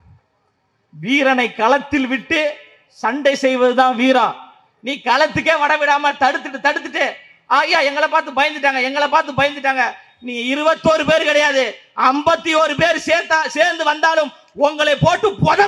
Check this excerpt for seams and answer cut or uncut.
uncut